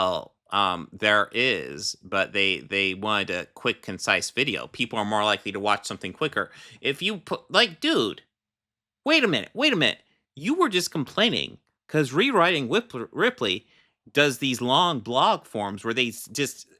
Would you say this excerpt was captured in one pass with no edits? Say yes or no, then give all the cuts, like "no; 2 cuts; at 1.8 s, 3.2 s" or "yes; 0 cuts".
yes; 0 cuts